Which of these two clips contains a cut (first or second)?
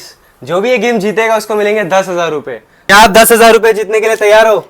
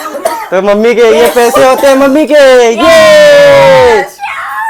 first